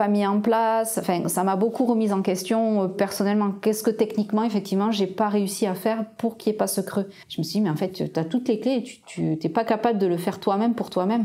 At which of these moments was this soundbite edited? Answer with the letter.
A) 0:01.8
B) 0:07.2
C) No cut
B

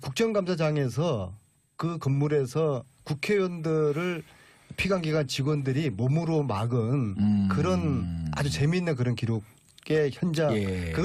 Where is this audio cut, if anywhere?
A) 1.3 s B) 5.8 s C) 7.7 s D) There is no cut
B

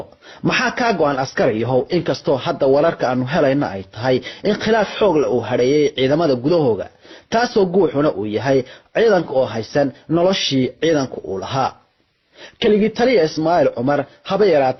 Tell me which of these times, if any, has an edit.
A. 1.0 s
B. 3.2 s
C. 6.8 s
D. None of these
D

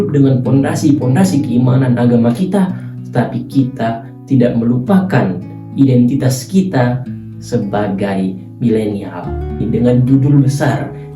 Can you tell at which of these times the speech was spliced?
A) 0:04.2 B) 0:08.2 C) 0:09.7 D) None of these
C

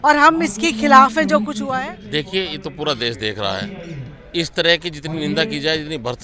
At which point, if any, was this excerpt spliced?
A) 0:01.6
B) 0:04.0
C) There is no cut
A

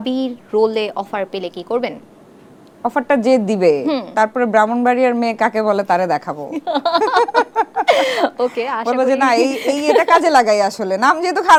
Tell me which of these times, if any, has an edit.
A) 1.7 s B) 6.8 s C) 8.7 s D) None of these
D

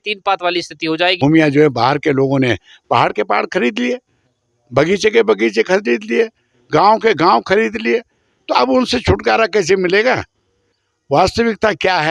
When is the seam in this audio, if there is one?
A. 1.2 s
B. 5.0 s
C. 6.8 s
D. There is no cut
A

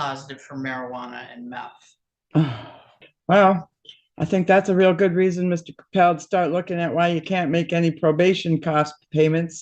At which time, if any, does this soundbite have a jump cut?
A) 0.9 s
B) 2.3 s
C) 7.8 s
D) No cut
D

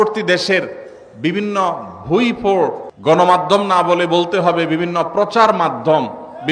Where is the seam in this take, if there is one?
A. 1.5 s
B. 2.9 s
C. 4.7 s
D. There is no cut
B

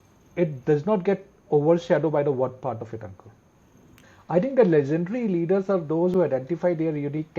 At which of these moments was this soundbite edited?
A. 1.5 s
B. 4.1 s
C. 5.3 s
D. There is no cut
B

